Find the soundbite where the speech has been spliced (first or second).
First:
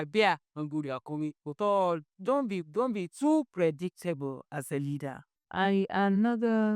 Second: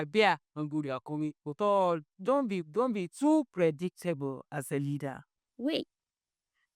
first